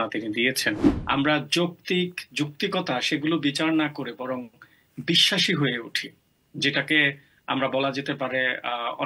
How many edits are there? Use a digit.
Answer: 1